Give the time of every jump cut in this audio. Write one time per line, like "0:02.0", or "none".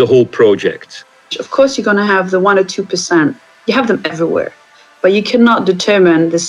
0:01.4